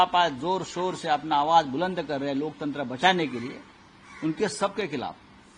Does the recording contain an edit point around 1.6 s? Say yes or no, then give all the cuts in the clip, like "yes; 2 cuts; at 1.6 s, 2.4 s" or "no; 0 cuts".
no; 0 cuts